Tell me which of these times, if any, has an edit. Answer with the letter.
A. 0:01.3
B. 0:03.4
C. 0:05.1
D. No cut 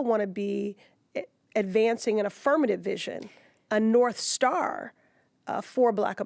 D